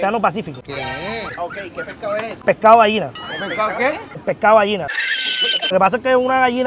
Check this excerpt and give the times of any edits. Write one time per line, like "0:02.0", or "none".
0:02.4
0:04.1
0:05.7